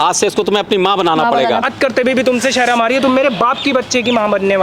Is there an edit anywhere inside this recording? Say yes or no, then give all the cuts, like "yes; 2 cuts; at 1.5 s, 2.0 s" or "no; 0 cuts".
yes; 1 cut; at 1.7 s